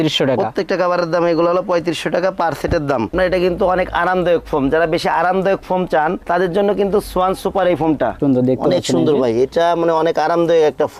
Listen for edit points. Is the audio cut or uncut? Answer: cut